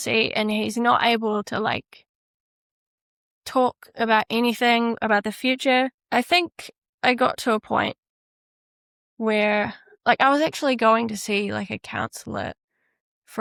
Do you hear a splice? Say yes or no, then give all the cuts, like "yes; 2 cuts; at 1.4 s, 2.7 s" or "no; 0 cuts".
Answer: no; 0 cuts